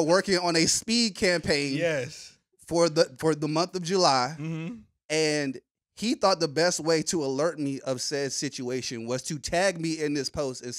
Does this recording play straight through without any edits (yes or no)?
yes